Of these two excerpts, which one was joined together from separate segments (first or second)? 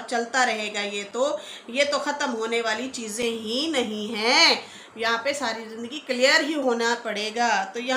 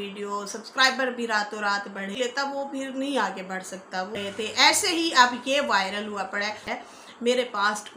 second